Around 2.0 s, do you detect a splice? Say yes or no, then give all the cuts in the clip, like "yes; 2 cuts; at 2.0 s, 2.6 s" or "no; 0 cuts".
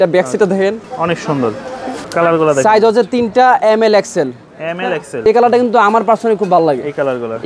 yes; 2 cuts; at 2.0 s, 5.3 s